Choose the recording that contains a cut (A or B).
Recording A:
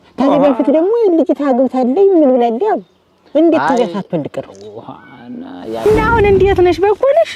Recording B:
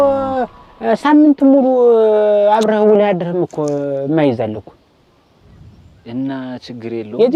A